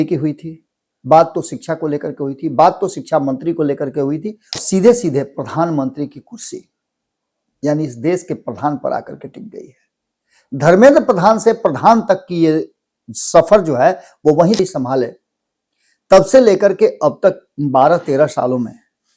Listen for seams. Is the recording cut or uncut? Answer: cut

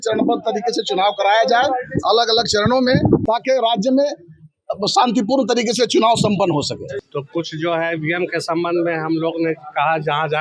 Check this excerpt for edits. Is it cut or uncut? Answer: cut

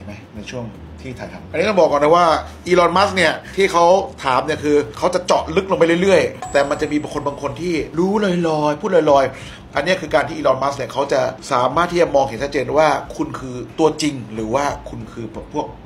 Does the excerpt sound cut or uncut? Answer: cut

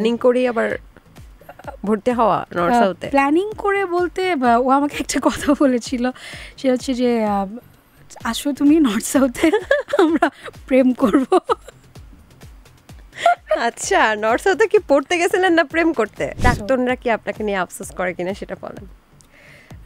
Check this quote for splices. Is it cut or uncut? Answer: cut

